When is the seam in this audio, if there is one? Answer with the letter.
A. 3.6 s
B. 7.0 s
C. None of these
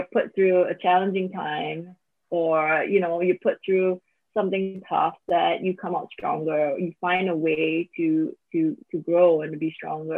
C